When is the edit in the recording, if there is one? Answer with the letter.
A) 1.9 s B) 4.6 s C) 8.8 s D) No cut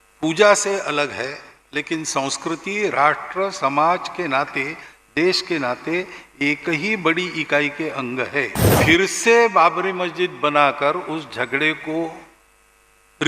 C